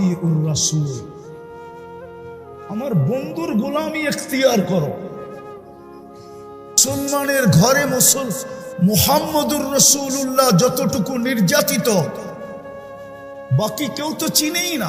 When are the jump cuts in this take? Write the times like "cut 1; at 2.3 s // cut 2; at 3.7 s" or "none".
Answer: cut 1; at 1.0 s // cut 2; at 2.5 s // cut 3; at 5.2 s // cut 4; at 6.7 s